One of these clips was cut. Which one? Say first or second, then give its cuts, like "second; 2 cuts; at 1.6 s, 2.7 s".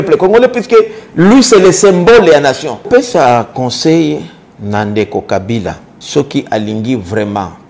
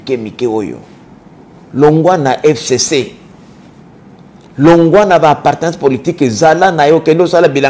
first; 2 cuts; at 2.7 s, 5.9 s